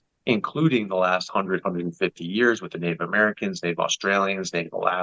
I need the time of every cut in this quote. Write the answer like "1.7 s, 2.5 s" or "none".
none